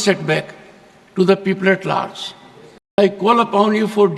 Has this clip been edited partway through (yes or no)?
yes